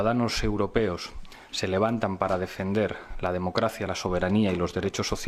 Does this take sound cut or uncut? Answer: uncut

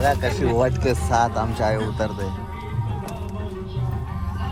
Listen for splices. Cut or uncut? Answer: uncut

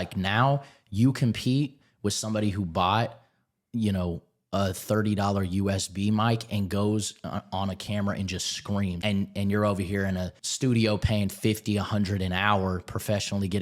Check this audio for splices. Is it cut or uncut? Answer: cut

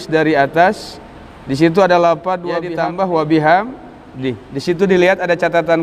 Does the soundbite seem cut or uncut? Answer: cut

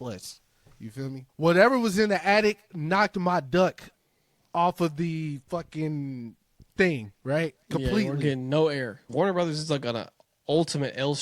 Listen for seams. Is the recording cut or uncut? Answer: cut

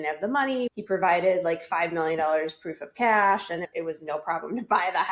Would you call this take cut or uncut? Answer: cut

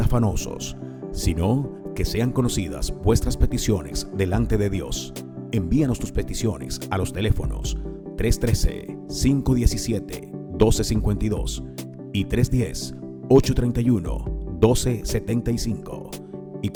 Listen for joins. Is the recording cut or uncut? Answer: uncut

